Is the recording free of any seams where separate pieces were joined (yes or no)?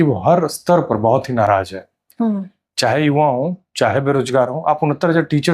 yes